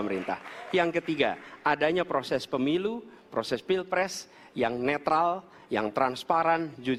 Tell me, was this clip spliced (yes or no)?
no